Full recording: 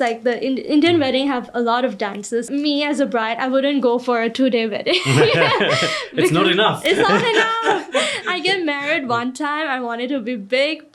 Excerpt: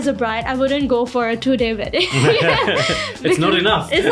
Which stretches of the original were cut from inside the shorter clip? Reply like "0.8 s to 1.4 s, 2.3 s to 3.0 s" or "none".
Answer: none